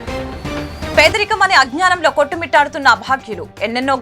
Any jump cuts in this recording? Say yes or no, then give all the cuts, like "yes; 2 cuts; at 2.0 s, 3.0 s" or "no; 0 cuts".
yes; 1 cut; at 1.0 s